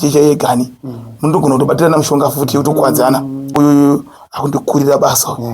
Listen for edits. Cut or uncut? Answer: cut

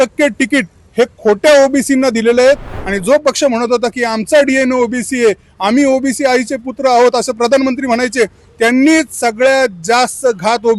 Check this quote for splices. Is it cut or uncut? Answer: cut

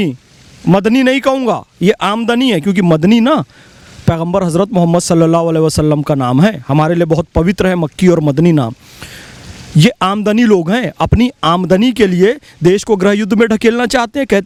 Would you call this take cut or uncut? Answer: uncut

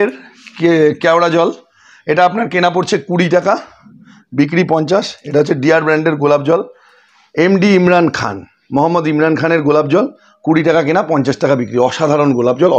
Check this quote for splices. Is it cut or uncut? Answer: uncut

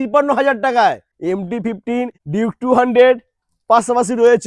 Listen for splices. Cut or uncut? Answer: cut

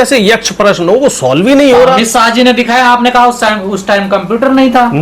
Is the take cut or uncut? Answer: uncut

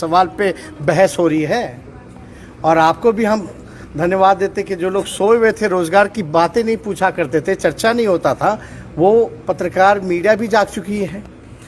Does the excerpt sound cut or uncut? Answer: uncut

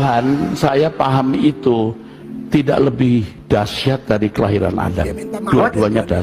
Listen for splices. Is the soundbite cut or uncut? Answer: uncut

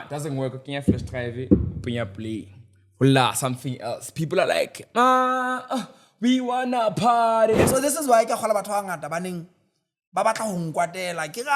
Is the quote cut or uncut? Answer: cut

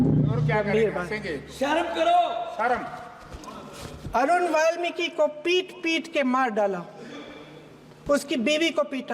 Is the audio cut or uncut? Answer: uncut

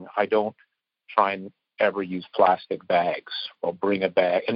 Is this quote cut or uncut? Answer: cut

